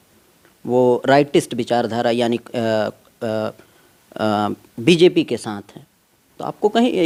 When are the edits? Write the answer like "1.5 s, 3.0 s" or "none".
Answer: none